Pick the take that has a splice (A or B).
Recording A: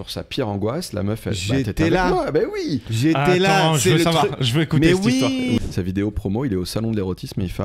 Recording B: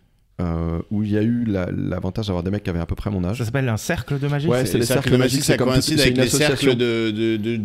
A